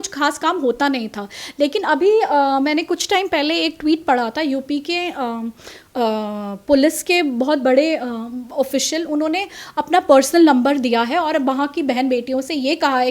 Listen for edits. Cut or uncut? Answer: uncut